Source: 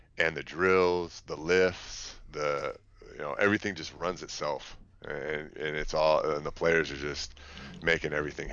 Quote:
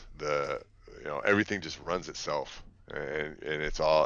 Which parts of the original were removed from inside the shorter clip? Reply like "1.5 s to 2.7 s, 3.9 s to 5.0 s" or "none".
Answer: none

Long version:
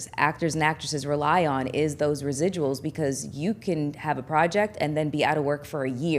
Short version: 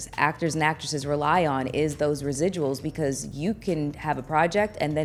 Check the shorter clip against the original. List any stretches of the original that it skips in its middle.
none

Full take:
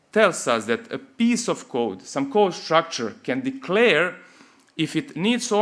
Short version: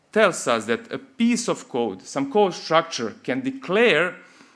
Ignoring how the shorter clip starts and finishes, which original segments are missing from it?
none

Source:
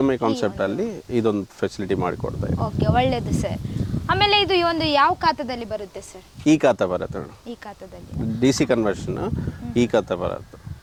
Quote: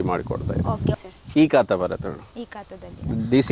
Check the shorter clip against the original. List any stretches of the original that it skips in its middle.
2.9 s to 6.0 s

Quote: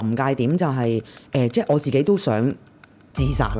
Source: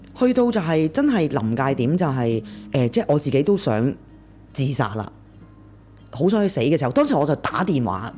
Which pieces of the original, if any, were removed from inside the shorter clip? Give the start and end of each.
none

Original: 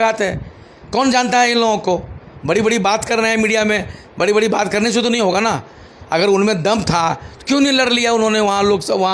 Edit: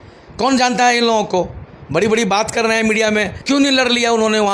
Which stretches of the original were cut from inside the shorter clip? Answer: 3.9 s to 7.3 s

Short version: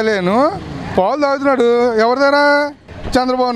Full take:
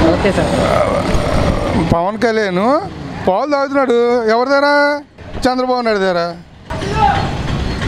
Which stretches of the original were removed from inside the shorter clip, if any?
none

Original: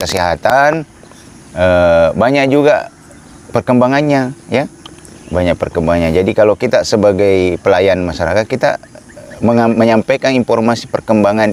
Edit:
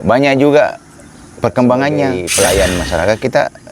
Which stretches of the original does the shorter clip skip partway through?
4.3 s to 7.5 s

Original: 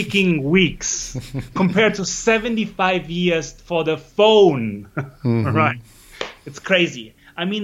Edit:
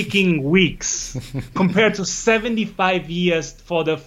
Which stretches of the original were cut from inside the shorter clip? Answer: none

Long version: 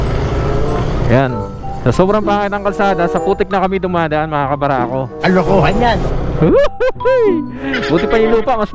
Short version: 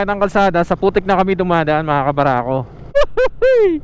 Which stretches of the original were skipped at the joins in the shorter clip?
5.4 s to 6.6 s

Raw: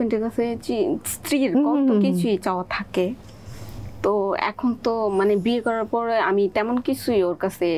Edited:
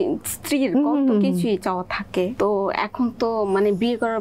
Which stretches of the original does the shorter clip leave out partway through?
3.1 s to 4.0 s

